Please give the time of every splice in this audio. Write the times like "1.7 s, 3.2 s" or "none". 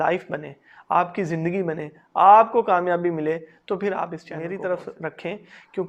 4.3 s